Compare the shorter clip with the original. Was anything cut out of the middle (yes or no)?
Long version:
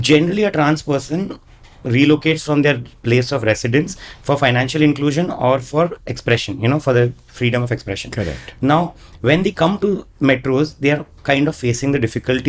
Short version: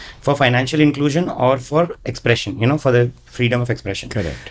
no